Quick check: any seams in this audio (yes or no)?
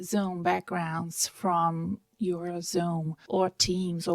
yes